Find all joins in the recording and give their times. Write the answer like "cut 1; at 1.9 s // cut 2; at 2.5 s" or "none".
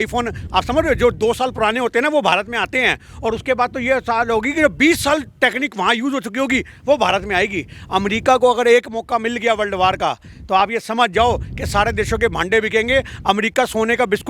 none

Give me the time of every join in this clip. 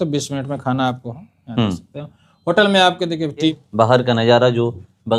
cut 1; at 3.6 s

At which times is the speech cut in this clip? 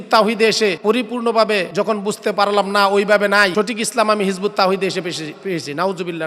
cut 1; at 0.8 s // cut 2; at 1.7 s // cut 3; at 3.5 s

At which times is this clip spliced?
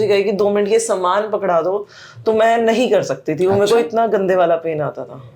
none

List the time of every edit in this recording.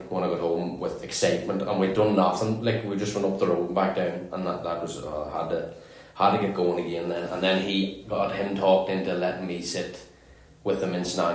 none

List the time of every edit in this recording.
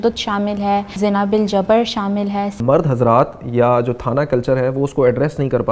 cut 1; at 0.9 s // cut 2; at 2.6 s

